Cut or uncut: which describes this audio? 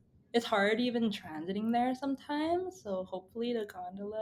uncut